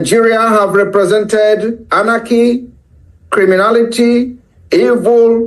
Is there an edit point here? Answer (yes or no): no